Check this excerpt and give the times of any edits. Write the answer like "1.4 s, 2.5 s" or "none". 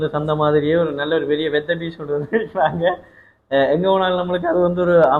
none